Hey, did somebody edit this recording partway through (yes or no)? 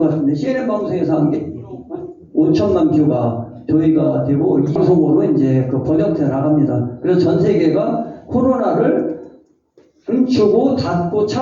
yes